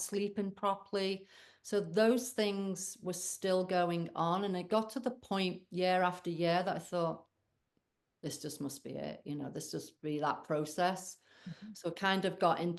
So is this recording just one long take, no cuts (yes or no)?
yes